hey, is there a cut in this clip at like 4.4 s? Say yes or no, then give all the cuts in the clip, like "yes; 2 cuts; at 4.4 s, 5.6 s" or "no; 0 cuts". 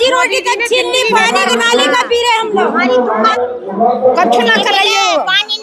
no; 1 cut; at 3.2 s